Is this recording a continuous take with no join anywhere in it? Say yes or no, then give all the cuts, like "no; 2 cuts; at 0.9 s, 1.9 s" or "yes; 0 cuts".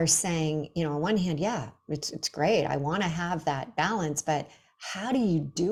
yes; 0 cuts